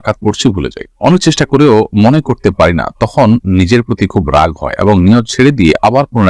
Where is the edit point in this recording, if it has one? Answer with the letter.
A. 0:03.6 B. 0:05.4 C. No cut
C